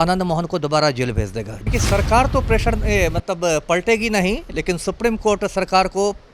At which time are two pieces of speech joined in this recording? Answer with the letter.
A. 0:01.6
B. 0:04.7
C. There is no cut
A